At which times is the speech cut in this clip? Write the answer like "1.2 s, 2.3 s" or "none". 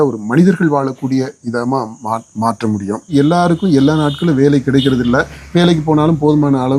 3.1 s

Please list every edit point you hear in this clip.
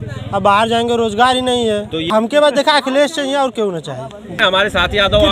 2.3 s, 4.4 s

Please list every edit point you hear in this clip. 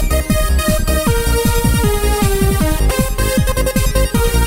3.2 s

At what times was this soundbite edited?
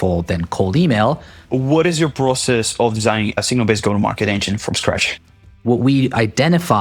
1.4 s, 3.4 s, 5.6 s

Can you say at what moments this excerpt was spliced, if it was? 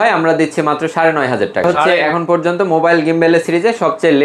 1.8 s

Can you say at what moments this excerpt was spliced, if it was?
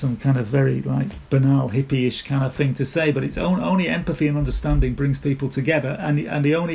none

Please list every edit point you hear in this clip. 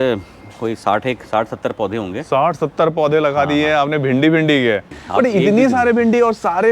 4.9 s

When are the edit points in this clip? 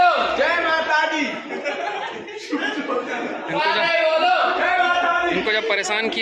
none

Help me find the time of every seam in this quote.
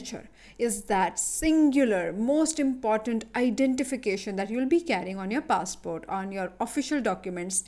none

